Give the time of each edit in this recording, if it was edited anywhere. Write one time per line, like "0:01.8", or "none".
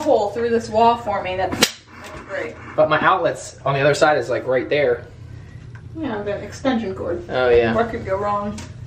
none